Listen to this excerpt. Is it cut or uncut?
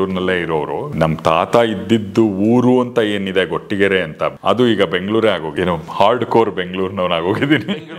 cut